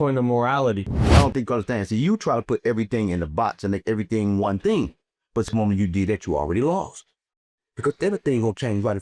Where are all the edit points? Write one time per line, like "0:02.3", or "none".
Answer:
0:00.9